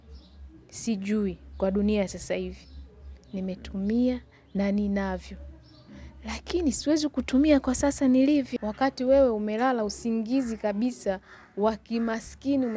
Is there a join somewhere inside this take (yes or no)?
yes